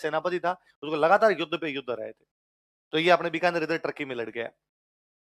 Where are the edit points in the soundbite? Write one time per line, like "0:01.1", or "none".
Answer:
none